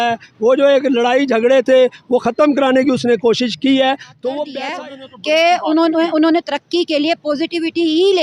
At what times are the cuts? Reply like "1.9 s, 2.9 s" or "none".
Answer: 4.6 s